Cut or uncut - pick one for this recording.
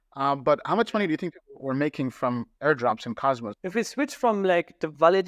cut